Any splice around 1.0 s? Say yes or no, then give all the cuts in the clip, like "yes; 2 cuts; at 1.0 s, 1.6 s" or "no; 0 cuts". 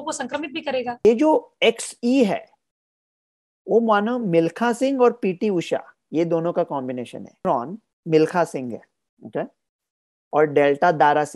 yes; 2 cuts; at 1.0 s, 7.4 s